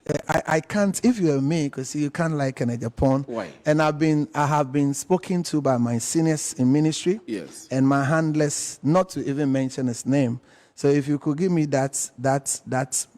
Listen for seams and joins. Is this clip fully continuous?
yes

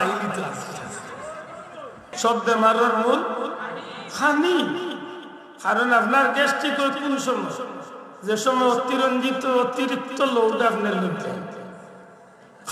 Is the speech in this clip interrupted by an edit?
yes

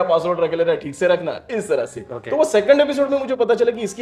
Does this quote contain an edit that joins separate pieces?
no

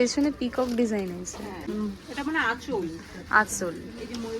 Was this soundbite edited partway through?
yes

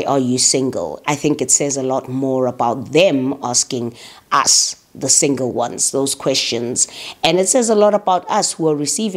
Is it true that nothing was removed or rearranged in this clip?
yes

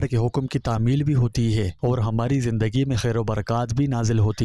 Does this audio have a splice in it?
no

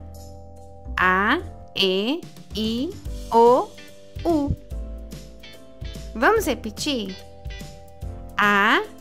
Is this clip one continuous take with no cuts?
no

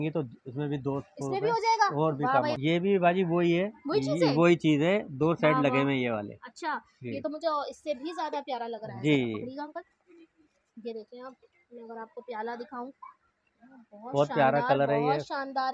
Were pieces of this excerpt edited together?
yes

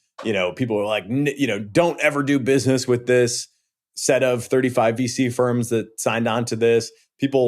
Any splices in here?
no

